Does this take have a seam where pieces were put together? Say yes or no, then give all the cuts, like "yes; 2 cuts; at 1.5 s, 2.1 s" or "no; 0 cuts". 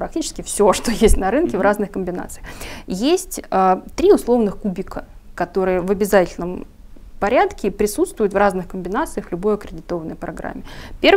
no; 0 cuts